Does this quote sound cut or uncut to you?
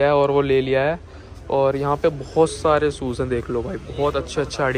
uncut